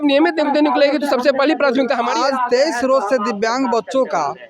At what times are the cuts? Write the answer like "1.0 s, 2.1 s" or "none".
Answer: 2.0 s